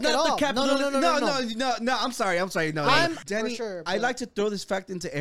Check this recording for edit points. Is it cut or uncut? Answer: cut